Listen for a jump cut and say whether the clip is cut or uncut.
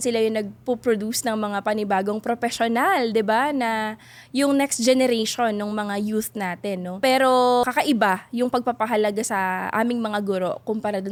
uncut